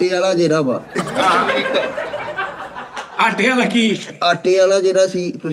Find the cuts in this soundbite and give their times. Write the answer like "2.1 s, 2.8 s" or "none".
none